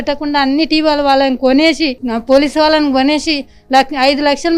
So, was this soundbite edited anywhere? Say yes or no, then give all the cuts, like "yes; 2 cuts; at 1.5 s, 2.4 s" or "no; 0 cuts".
no; 0 cuts